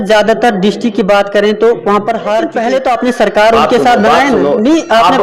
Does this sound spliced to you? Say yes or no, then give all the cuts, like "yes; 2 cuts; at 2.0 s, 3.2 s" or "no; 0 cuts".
yes; 1 cut; at 2.5 s